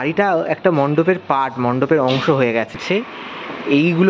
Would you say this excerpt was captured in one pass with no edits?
no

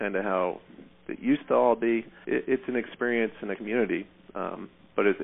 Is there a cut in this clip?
yes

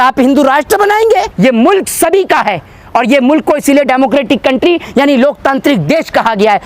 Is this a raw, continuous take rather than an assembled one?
no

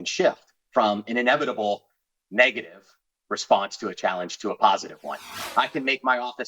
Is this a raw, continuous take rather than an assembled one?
no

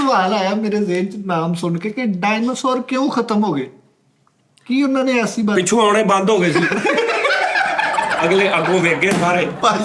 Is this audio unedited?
yes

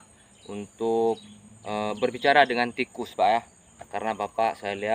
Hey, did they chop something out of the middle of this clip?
no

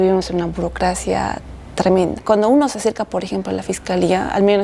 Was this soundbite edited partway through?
yes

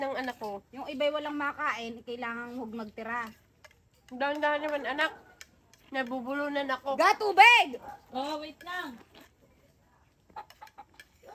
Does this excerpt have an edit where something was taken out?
no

